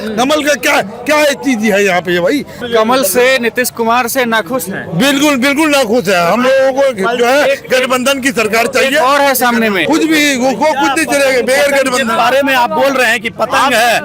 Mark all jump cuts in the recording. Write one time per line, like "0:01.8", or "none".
0:02.6
0:09.8